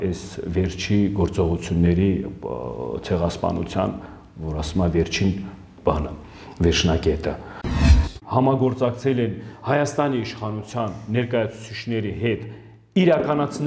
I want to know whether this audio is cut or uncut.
cut